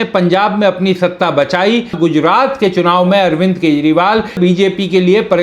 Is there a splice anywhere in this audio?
yes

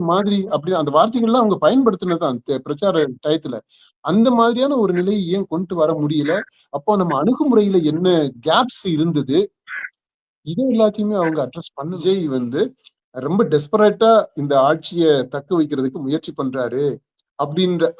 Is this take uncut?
no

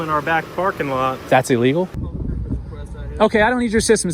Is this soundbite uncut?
no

